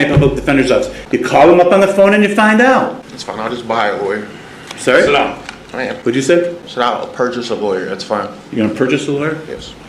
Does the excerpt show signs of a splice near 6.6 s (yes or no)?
yes